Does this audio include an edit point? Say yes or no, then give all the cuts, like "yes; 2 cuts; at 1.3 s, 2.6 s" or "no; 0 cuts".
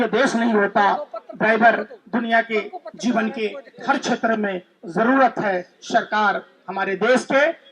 no; 0 cuts